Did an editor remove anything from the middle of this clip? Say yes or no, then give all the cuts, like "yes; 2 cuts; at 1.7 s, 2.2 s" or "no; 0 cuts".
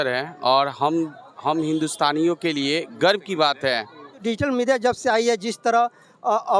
yes; 1 cut; at 4.2 s